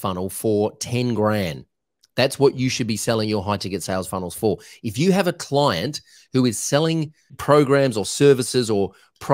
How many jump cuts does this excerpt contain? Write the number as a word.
one